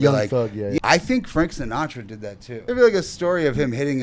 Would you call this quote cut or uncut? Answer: cut